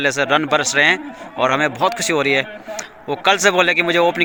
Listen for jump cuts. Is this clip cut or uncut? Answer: uncut